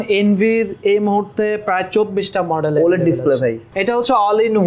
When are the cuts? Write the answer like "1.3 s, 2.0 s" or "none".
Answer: 3.7 s